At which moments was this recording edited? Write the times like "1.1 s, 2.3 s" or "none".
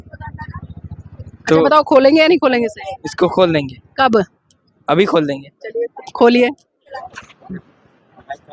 6.9 s